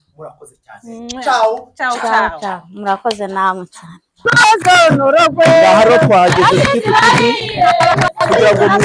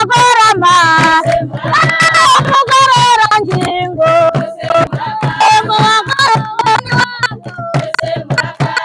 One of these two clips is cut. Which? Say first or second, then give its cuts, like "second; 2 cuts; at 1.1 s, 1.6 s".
first; 1 cut; at 4.3 s